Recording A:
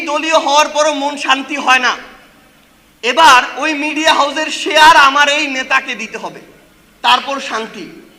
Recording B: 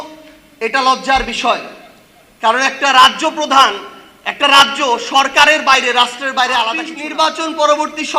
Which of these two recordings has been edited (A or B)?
B